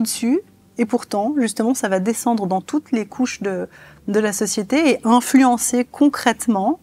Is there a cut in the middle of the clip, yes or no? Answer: no